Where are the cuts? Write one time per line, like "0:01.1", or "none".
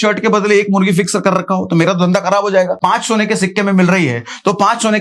0:02.8